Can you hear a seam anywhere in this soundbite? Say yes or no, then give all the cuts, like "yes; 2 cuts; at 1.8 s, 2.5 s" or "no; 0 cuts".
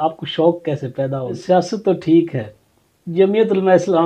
yes; 1 cut; at 1.4 s